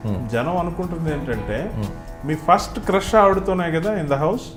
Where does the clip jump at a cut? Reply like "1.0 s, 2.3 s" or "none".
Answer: none